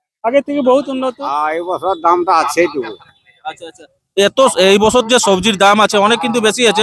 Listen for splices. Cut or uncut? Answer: cut